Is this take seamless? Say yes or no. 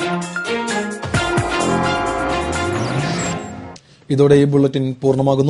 yes